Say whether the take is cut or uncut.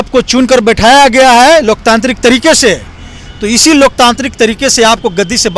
uncut